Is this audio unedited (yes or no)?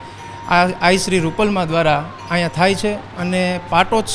yes